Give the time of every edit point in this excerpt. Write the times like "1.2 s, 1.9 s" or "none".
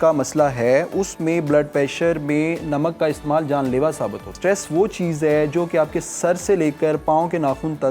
4.3 s